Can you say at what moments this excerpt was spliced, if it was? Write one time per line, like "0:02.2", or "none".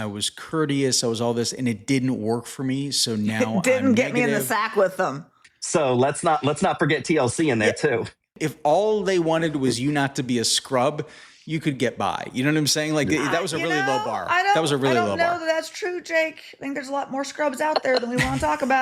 0:05.3
0:08.4

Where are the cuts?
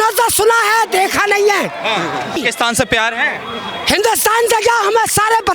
0:02.4

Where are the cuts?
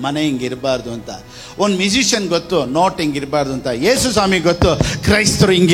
none

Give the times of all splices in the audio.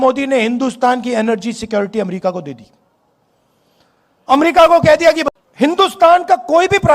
0:05.2

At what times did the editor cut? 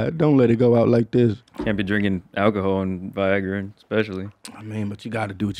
0:01.5

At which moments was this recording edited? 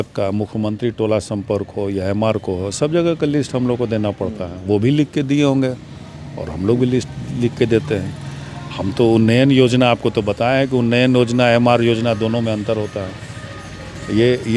none

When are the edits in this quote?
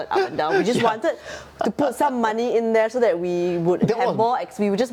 none

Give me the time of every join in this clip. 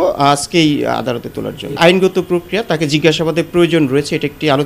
0:01.8

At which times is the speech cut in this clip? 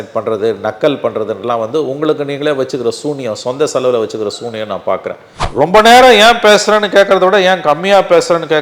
0:05.3

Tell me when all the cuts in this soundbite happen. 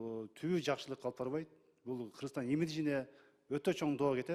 none

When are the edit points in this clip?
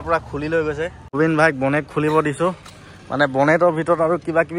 0:01.0

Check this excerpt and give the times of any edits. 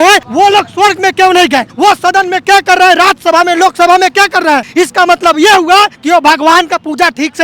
0:04.7
0:06.0

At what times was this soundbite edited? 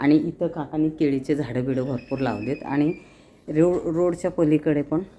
none

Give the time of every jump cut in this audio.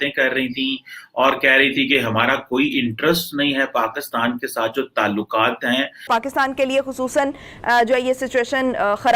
0:06.1

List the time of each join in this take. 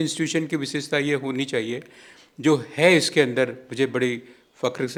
none

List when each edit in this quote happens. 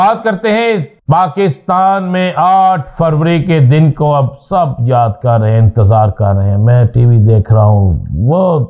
0:00.9

